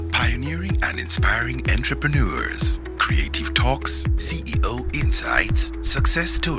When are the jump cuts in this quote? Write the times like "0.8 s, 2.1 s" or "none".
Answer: none